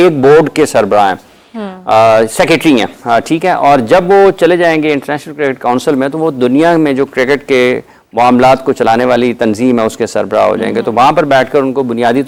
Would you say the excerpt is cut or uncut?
uncut